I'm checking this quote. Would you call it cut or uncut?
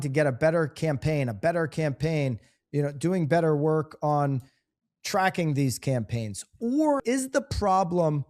cut